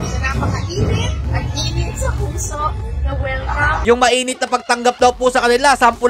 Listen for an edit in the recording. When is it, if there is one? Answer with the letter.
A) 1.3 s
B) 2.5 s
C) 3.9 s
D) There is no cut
C